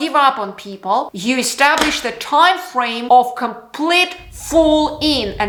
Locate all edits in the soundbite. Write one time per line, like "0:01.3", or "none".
none